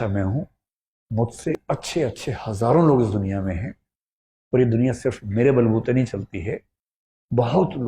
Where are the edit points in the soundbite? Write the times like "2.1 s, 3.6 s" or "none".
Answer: 1.5 s